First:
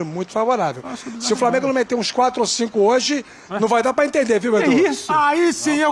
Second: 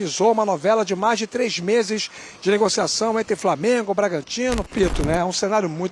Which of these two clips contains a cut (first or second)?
second